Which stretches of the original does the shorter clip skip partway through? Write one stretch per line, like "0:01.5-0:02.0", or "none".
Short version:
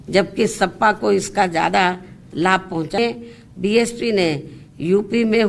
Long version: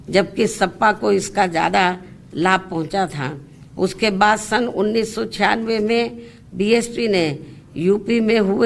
0:03.0-0:05.9